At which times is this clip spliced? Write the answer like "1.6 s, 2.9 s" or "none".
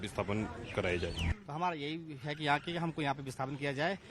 1.2 s